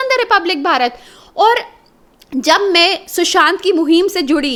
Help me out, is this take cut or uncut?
uncut